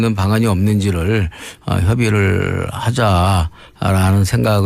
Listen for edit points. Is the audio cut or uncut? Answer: cut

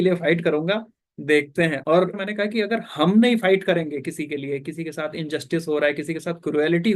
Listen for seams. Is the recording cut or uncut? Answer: cut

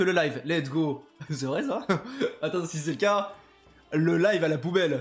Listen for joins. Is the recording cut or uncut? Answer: uncut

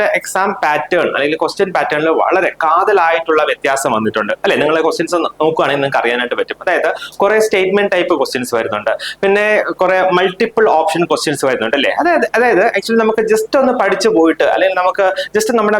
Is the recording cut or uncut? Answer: uncut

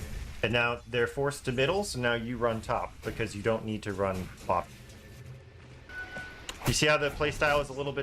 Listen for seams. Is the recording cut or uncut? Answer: cut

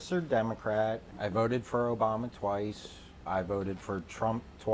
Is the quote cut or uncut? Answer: cut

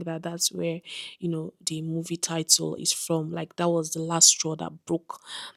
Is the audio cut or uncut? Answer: uncut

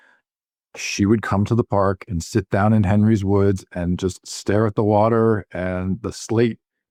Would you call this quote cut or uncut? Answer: uncut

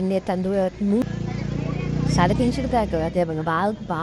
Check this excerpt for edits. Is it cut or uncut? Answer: cut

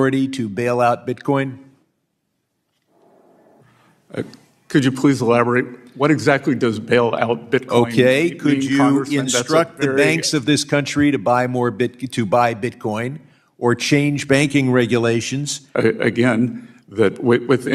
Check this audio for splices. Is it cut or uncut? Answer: cut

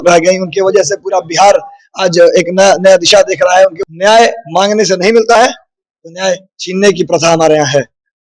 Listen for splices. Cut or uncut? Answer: cut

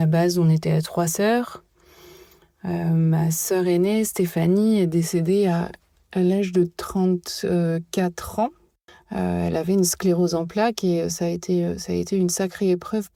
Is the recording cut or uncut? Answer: uncut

